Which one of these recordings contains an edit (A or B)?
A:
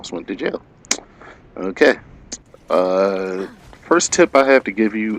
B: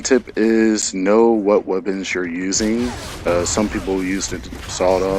B